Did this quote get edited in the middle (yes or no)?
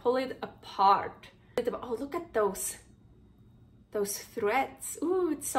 yes